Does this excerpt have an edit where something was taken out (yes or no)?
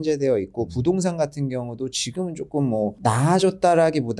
no